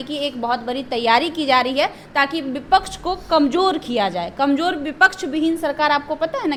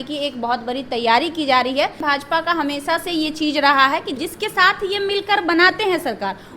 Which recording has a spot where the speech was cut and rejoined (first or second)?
second